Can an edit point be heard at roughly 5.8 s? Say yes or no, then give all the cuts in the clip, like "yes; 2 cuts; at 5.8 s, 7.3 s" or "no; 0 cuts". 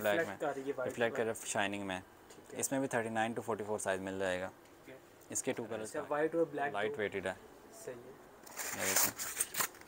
yes; 2 cuts; at 5.8 s, 6.8 s